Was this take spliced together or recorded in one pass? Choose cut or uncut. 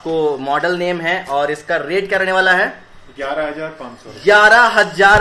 uncut